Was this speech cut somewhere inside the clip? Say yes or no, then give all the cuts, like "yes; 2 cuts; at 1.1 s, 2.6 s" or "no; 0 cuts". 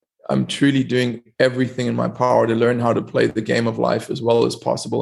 no; 0 cuts